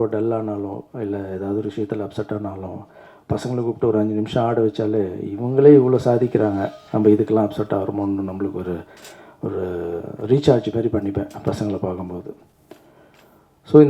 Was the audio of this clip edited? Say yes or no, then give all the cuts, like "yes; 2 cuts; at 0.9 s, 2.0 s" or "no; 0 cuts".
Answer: no; 0 cuts